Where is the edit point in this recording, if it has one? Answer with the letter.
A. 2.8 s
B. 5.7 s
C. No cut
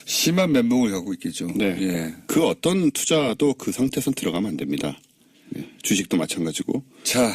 A